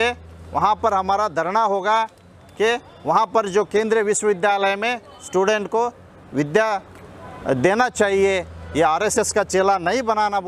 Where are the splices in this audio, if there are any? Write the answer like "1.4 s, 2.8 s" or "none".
none